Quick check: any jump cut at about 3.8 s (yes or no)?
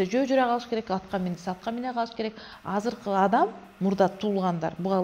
no